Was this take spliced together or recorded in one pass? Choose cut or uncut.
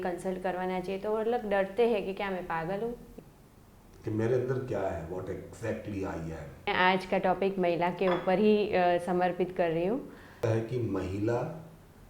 cut